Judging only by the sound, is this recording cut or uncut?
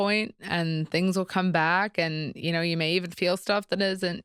uncut